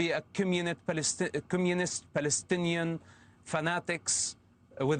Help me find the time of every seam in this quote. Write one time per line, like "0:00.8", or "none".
none